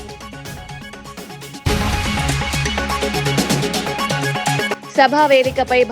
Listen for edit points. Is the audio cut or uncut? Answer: cut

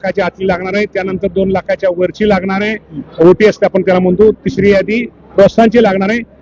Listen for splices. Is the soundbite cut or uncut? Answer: uncut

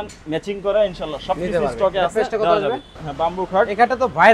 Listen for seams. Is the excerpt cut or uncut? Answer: cut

